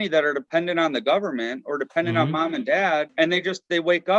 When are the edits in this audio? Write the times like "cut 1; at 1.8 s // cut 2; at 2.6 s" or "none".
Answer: cut 1; at 3.1 s